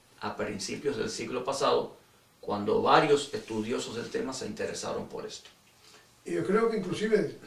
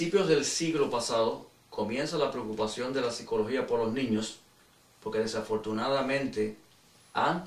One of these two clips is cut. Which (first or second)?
second